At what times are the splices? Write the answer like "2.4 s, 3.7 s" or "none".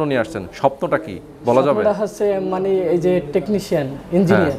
none